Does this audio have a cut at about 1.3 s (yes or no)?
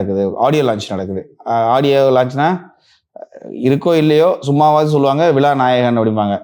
no